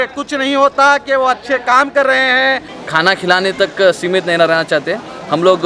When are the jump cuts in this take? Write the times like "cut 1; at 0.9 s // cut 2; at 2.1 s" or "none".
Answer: cut 1; at 2.7 s